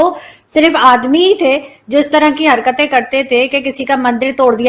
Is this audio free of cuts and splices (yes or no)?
yes